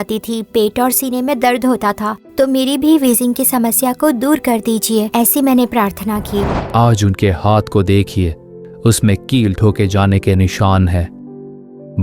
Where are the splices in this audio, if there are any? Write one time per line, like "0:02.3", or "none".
0:02.3
0:06.5